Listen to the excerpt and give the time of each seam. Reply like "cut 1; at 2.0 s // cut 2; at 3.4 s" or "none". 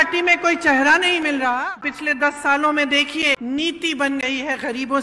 cut 1; at 1.7 s // cut 2; at 3.4 s